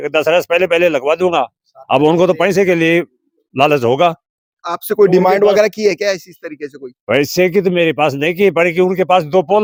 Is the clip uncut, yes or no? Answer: yes